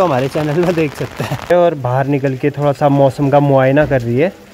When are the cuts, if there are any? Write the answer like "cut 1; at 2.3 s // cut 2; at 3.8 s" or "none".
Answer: cut 1; at 1.5 s